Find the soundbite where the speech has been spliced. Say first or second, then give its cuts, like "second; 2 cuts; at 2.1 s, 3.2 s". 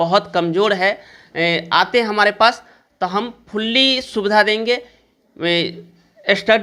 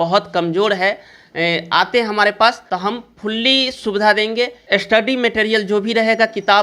second; 2 cuts; at 2.6 s, 4.6 s